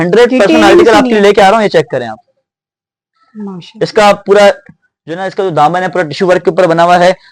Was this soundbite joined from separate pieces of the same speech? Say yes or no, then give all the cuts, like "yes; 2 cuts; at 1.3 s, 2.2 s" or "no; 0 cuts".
no; 0 cuts